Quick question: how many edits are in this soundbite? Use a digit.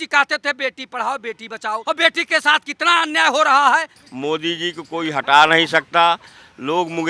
2